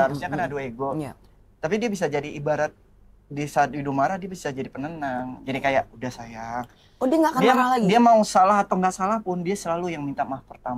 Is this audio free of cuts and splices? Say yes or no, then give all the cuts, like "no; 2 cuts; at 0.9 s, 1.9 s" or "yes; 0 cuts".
yes; 0 cuts